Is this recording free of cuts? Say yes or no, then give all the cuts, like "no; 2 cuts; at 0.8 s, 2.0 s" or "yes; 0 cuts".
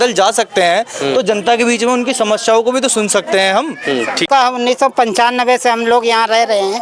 no; 1 cut; at 4.3 s